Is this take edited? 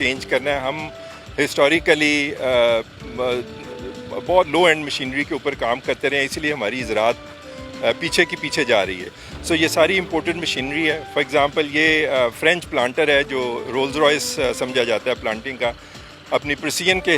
no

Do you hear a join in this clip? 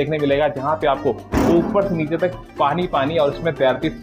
no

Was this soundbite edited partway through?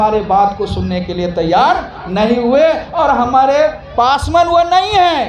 no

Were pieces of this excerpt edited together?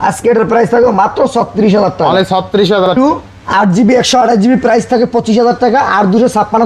yes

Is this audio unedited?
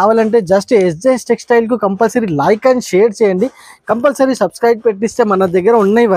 yes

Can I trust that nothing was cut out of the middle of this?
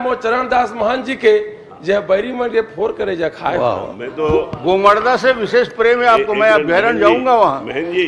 yes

